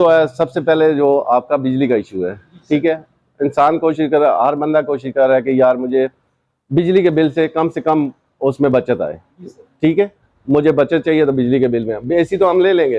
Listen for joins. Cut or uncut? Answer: uncut